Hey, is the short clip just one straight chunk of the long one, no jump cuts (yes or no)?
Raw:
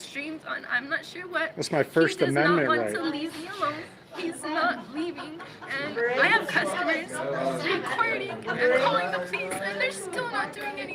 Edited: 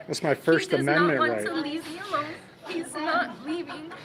yes